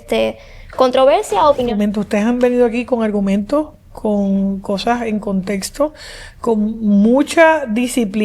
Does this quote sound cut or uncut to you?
cut